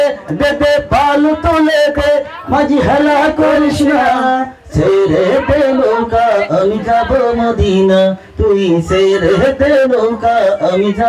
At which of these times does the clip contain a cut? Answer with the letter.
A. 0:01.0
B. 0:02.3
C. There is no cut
B